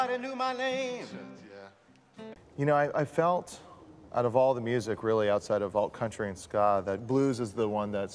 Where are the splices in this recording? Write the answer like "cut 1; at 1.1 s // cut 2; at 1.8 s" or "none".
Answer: none